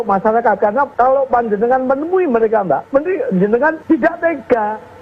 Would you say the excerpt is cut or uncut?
cut